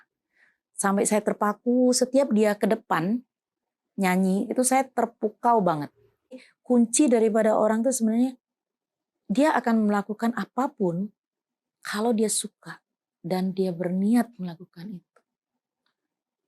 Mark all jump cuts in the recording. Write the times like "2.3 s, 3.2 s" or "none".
6.5 s